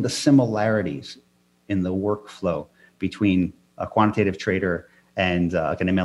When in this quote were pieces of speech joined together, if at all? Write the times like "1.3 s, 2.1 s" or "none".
none